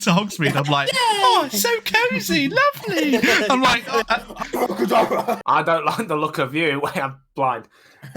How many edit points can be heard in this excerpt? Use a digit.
1